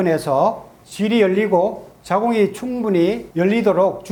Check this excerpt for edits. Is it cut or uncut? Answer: uncut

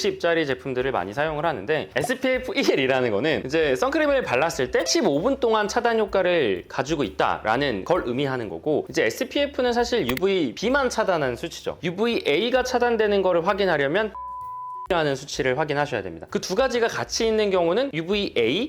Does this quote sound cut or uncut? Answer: cut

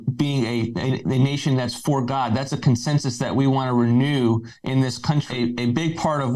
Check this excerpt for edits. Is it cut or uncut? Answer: cut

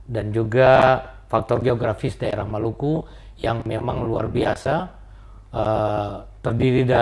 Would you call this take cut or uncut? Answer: uncut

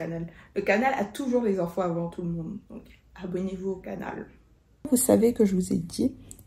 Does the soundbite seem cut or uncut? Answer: cut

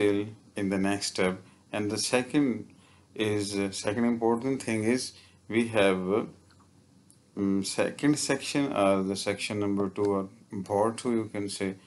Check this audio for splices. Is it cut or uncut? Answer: uncut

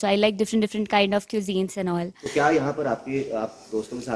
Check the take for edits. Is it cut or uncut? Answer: uncut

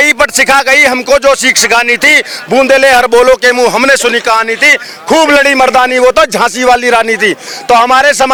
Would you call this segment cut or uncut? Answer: uncut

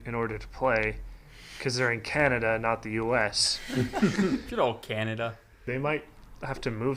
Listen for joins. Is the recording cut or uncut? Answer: cut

